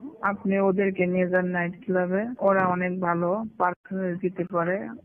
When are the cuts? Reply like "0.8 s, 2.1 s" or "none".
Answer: 2.3 s

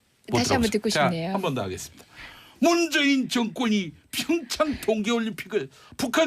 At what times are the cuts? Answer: 3.4 s

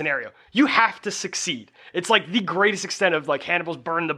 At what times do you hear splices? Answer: none

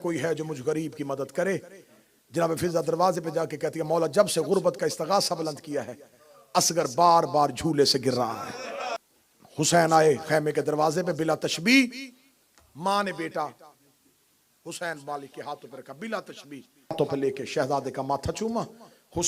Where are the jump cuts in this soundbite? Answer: 9.0 s, 17.0 s

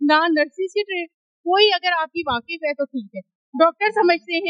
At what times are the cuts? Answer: none

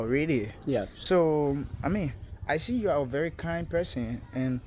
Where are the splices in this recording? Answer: 0.9 s

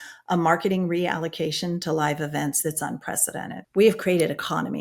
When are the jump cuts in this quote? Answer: 3.5 s

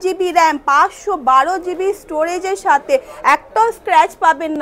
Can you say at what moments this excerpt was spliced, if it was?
none

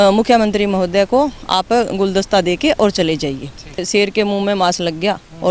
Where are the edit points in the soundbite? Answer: 3.8 s

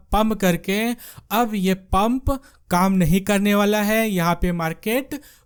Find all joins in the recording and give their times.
none

